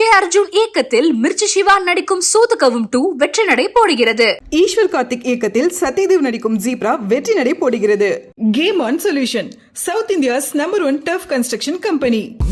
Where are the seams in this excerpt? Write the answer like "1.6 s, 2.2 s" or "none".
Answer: none